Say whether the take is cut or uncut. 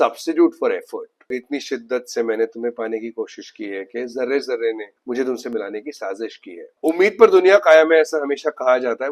cut